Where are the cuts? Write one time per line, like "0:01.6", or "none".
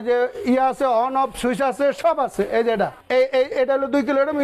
0:03.0